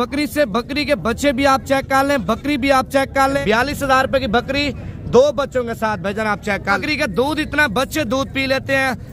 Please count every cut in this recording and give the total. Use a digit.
2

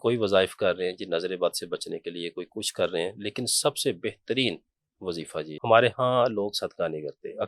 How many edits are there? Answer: 1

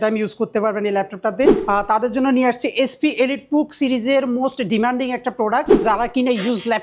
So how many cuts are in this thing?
2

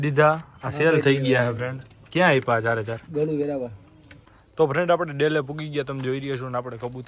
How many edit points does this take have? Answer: 1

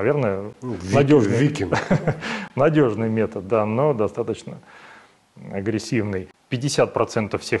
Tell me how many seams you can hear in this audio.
1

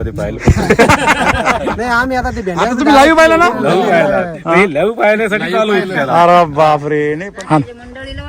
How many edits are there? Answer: 1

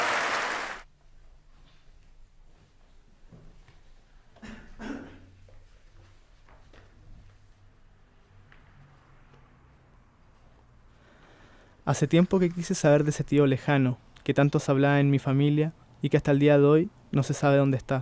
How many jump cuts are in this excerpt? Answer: 1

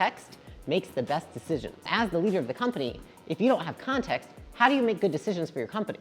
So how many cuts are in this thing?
1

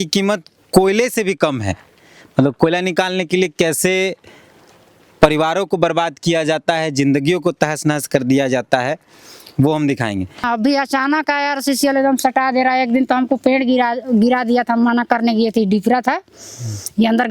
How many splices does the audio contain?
1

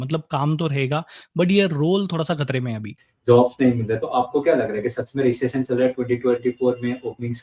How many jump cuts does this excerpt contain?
1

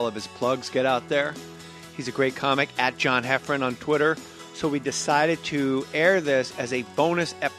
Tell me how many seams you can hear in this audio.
1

